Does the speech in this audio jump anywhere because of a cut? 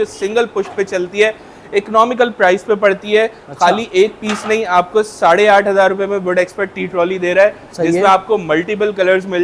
no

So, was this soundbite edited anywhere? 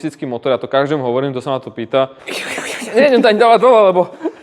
yes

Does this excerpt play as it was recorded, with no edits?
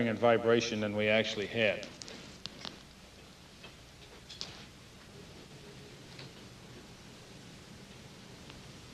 no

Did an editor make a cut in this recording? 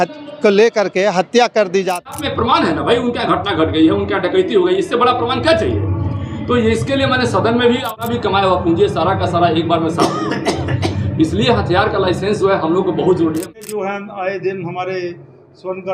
yes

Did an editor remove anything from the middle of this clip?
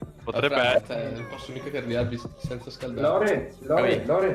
no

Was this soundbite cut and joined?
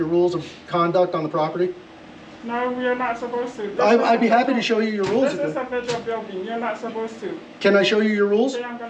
no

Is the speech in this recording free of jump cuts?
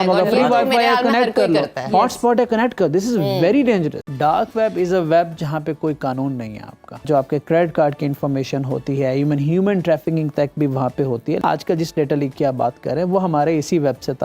no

